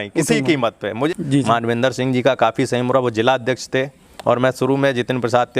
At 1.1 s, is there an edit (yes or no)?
yes